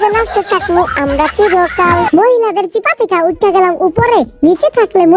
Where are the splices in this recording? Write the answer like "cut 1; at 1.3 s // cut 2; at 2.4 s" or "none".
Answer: cut 1; at 2.1 s